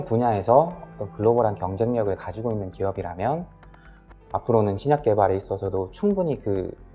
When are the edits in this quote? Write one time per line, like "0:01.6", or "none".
none